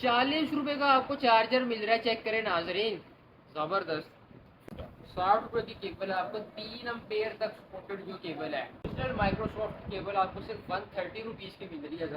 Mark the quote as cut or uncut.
cut